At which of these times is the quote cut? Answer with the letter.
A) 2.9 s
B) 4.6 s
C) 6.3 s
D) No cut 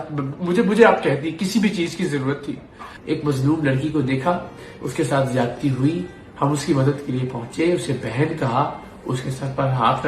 A